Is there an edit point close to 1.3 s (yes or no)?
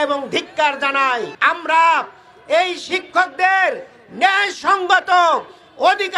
yes